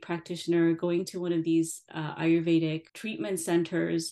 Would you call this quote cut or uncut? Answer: cut